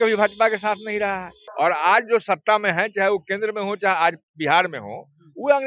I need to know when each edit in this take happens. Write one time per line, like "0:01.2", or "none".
0:01.4